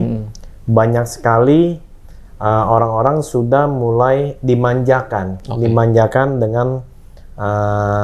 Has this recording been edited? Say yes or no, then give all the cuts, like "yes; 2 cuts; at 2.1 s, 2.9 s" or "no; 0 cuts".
no; 0 cuts